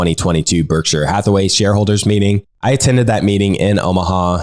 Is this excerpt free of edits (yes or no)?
no